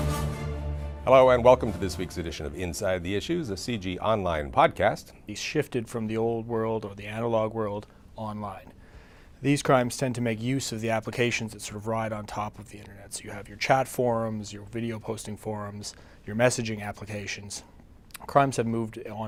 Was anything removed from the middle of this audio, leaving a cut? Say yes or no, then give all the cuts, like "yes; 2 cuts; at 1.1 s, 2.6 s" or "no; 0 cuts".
no; 0 cuts